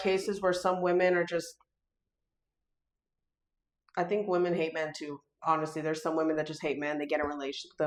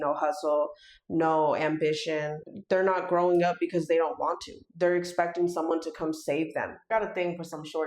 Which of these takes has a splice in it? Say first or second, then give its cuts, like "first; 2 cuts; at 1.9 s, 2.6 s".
second; 2 cuts; at 2.5 s, 6.9 s